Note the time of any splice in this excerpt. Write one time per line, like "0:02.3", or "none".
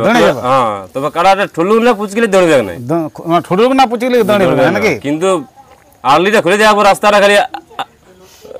none